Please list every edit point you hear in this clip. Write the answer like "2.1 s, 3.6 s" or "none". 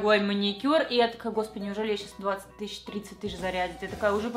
none